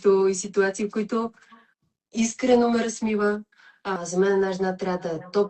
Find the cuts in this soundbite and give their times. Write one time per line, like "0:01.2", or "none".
0:04.0